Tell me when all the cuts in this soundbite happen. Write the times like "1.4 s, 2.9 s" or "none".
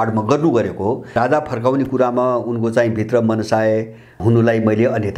1.2 s, 4.2 s